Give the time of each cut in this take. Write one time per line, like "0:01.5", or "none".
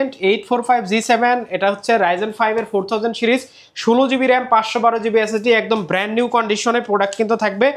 none

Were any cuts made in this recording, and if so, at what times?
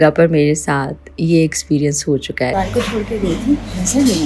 0:02.5

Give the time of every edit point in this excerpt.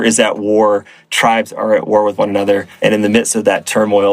0:02.7

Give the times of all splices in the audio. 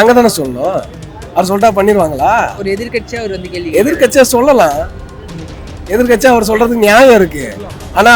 none

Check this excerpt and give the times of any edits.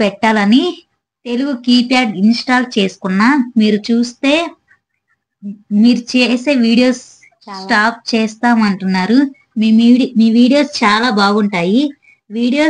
none

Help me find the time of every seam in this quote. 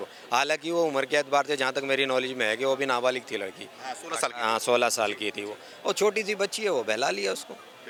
none

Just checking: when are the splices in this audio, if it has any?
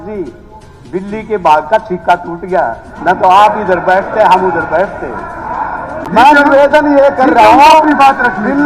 0:06.0

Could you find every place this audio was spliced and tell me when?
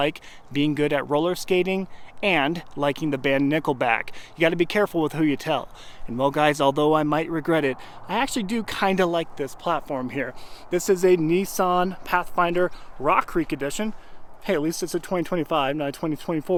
none

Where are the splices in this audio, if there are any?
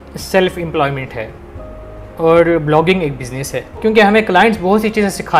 0:03.8

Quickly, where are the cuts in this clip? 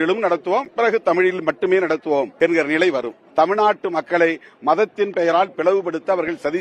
0:02.3
0:03.2

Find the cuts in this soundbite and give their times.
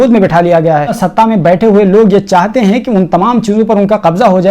0:01.0

